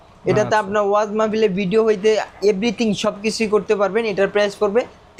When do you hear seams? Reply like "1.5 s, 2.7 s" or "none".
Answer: none